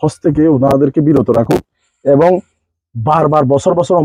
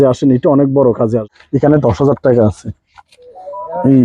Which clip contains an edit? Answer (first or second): second